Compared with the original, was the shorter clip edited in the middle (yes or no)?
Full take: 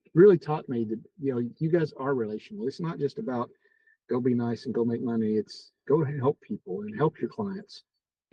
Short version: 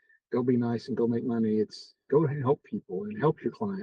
no